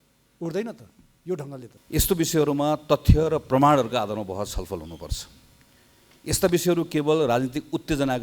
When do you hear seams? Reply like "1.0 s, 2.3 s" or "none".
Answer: 1.7 s